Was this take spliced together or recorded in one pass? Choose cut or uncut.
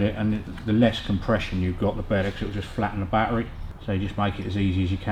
uncut